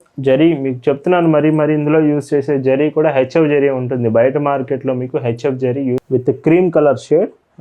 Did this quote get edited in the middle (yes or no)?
yes